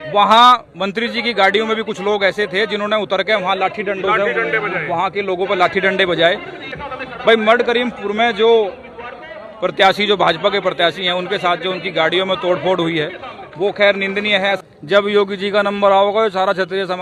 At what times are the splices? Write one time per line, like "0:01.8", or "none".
0:06.6
0:14.6